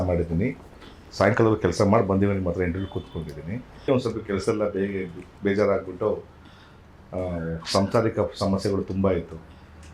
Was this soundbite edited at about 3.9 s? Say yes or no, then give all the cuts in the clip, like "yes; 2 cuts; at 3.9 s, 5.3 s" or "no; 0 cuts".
yes; 1 cut; at 3.9 s